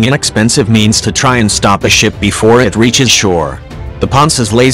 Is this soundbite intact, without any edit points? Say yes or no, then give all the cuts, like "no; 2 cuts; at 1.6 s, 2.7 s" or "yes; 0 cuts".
yes; 0 cuts